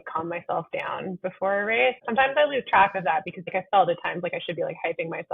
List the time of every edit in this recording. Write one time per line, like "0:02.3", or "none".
0:02.0
0:03.5